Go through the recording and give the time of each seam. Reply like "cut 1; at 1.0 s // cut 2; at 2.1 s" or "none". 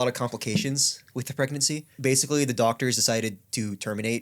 cut 1; at 1.9 s